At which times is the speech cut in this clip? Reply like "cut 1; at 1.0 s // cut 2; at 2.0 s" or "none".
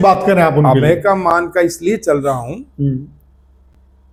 none

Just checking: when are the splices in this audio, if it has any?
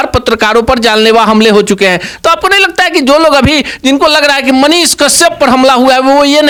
none

